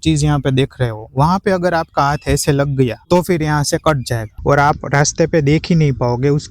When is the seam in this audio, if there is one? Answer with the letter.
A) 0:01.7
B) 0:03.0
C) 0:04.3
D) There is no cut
C